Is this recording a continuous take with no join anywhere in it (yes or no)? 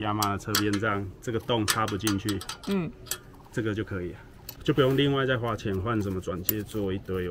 yes